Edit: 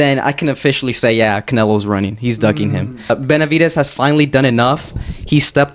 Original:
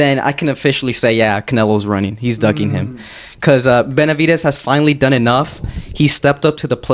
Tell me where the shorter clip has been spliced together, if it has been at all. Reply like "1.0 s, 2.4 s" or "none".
3.1 s

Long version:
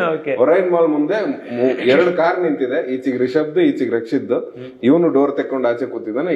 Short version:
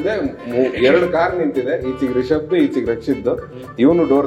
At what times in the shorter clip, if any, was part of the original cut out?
none

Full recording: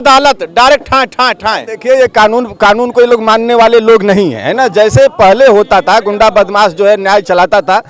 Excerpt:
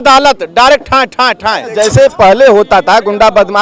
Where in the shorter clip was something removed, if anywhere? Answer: 1.7 s

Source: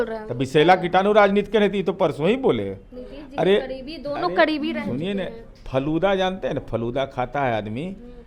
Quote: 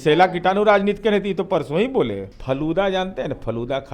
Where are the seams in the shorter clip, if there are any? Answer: 2.3 s

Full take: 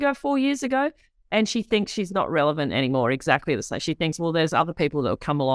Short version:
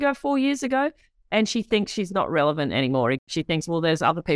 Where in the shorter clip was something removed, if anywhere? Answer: 3.2 s

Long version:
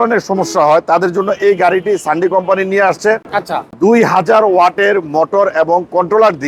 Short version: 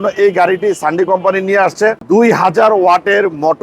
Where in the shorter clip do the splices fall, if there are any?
2.0 s

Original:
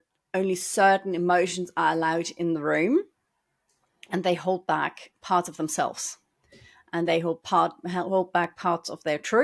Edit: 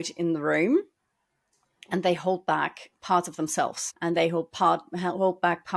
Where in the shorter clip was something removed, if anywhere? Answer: 3.9 s

